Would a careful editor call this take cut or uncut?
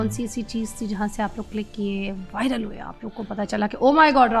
uncut